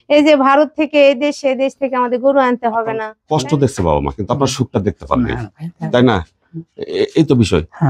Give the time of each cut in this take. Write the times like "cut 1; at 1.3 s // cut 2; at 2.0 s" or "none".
cut 1; at 3.1 s